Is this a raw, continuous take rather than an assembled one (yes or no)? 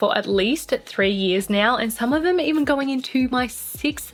yes